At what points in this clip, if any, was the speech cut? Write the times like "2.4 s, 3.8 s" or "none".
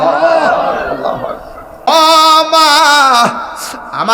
1.9 s